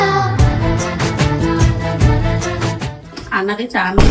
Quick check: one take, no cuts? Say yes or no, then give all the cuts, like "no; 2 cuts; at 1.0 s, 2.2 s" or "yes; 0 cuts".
no; 1 cut; at 3.2 s